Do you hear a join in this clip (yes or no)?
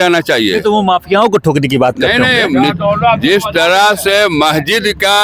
no